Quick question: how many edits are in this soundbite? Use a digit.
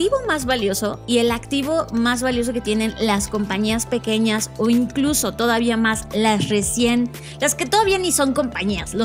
1